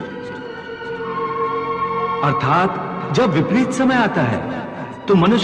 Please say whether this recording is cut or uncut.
uncut